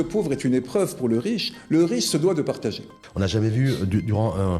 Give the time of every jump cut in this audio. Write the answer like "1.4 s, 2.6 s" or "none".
3.0 s